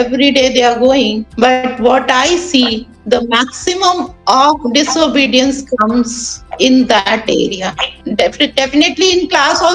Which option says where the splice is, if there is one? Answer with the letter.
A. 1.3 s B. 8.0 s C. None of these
B